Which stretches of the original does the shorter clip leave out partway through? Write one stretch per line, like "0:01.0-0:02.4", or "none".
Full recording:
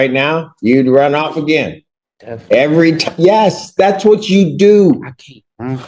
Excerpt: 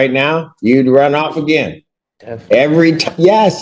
none